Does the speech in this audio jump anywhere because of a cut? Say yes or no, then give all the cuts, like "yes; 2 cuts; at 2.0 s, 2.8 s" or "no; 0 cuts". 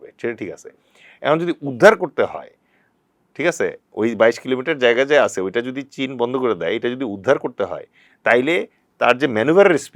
no; 0 cuts